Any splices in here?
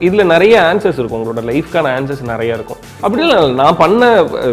yes; 1 cut; at 2.8 s

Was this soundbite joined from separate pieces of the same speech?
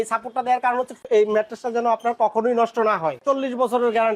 yes; 1 cut; at 3.2 s

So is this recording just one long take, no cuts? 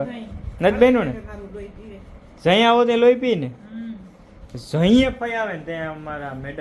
yes; 0 cuts

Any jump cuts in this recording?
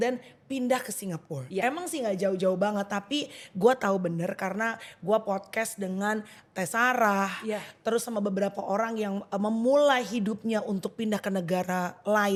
no; 0 cuts

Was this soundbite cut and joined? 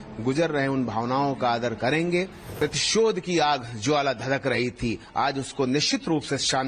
yes; 1 cut; at 2.4 s

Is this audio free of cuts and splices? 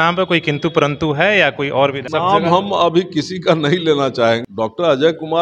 no; 2 cuts; at 2.0 s, 4.4 s

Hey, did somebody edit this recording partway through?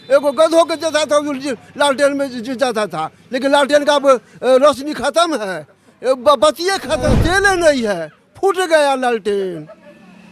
yes; 1 cut; at 7.1 s

